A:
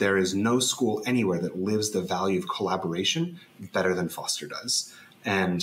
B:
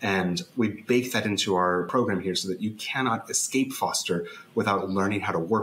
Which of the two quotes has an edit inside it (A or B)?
B